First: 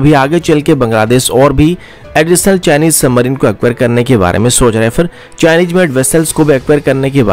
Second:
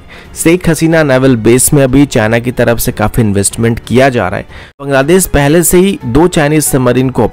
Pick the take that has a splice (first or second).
second